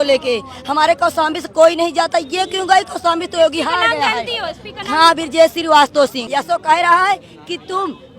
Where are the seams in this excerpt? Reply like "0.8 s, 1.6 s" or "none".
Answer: 6.2 s

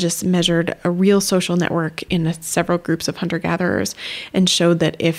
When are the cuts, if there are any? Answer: 2.0 s

